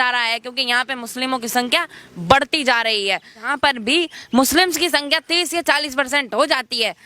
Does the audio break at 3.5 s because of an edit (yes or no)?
yes